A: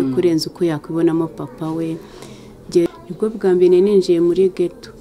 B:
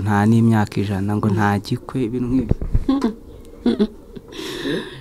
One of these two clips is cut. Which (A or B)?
A